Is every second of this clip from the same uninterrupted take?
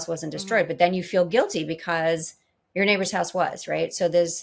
yes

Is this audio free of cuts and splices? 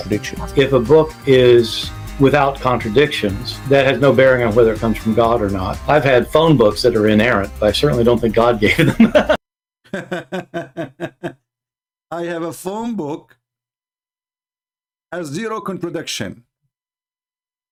yes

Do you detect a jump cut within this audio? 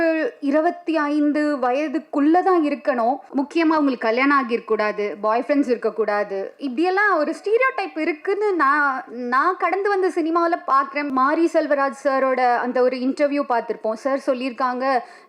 yes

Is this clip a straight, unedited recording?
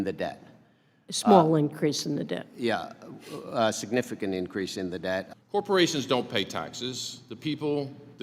no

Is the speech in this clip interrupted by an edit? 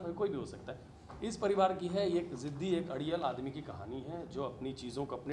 no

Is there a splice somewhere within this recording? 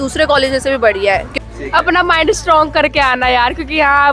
yes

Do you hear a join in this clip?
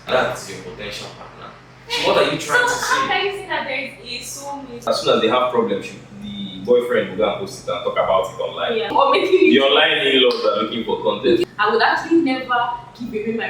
yes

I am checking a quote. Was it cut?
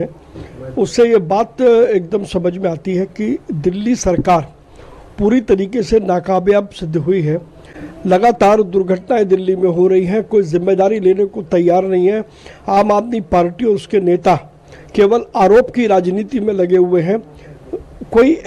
no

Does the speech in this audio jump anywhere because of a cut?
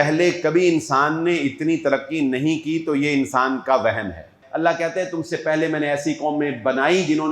yes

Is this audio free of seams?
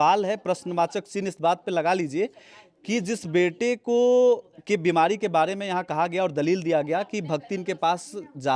yes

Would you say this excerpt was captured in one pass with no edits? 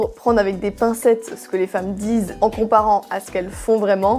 yes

